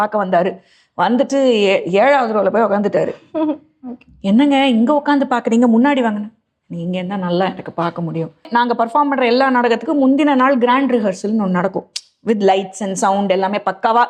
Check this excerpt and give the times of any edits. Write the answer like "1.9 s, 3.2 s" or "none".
8.5 s